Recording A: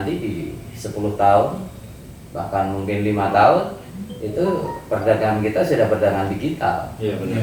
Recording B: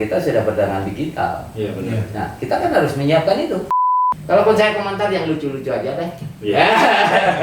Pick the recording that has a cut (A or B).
B